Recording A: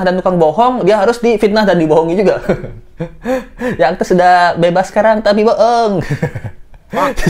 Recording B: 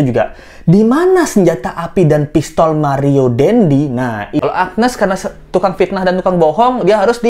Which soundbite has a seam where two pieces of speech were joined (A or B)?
B